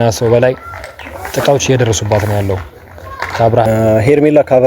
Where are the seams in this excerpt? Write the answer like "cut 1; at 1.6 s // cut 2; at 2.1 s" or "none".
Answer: cut 1; at 3.6 s